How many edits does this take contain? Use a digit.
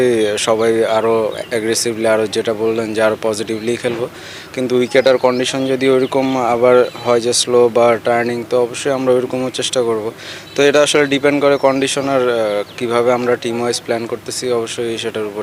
0